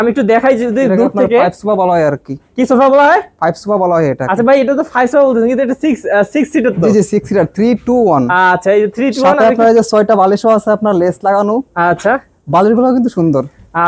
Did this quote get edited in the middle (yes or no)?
no